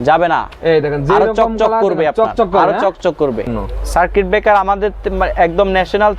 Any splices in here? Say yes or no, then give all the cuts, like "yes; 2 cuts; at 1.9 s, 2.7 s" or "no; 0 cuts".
yes; 1 cut; at 3.6 s